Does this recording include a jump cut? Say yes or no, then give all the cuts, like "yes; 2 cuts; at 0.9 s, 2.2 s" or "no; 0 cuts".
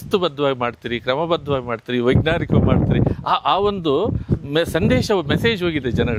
no; 0 cuts